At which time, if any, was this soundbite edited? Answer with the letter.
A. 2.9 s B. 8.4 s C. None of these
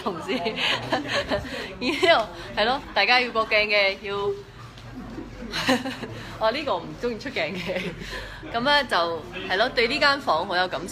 B